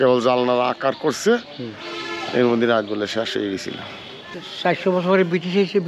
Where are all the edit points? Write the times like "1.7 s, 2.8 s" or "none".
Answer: 4.4 s